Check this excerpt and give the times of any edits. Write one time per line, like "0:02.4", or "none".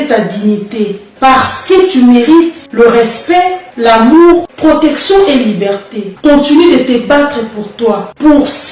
0:01.1
0:06.1